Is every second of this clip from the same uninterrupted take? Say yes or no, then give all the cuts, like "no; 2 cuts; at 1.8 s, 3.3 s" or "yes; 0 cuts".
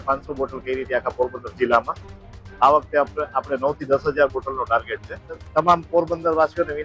no; 1 cut; at 5.4 s